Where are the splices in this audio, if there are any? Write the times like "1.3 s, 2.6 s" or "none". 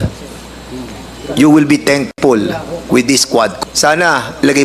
3.5 s